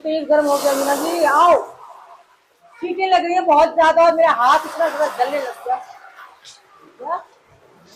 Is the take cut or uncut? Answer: uncut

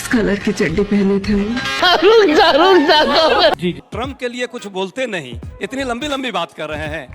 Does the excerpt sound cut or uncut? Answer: cut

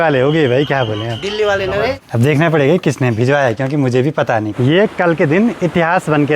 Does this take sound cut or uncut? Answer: cut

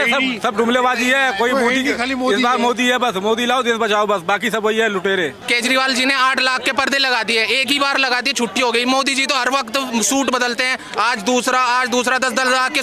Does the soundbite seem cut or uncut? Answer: cut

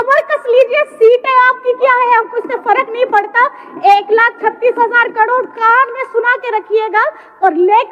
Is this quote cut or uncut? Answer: uncut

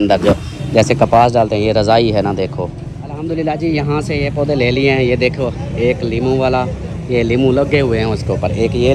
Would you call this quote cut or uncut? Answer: cut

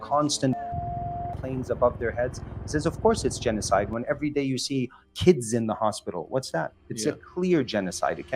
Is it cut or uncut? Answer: uncut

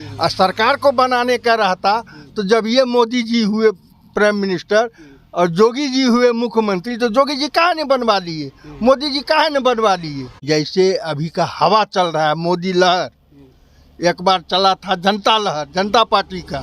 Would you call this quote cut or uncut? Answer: cut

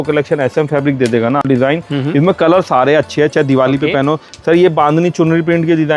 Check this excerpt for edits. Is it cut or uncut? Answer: cut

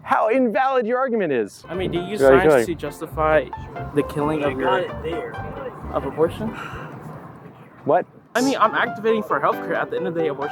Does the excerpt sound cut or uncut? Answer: cut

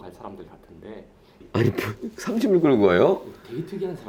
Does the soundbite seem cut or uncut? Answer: cut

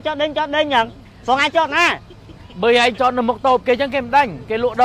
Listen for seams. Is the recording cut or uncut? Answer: uncut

